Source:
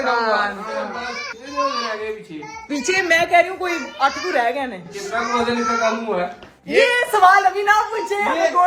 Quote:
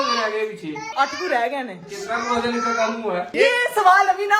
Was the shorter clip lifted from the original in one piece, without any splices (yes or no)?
no